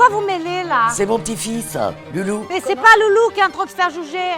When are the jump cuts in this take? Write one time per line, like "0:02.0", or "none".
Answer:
0:02.5